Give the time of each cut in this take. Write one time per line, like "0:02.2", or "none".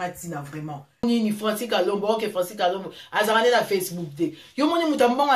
0:01.0